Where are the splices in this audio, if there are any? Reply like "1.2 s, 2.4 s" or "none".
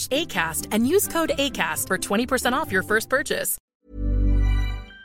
3.7 s